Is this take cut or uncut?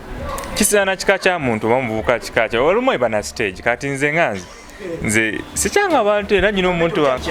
uncut